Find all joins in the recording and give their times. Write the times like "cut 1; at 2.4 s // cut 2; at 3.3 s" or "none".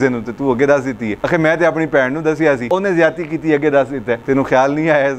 cut 1; at 1.1 s // cut 2; at 2.7 s // cut 3; at 4.2 s